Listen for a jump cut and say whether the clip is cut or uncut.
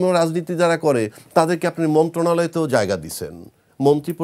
uncut